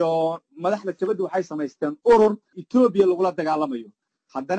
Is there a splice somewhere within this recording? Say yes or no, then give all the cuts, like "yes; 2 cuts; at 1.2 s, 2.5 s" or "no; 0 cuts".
yes; 1 cut; at 2.5 s